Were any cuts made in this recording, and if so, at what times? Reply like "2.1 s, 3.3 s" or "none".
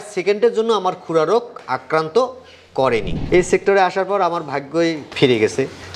3.2 s